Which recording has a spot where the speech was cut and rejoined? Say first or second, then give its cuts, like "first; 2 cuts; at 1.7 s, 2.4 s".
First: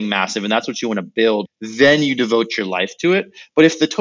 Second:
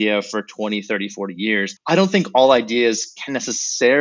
first; 1 cut; at 1.6 s